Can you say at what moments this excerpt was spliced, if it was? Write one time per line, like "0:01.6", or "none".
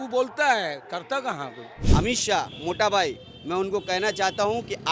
0:01.8